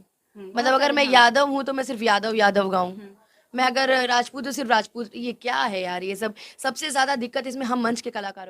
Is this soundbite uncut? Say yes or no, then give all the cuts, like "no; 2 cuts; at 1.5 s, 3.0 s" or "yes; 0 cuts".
yes; 0 cuts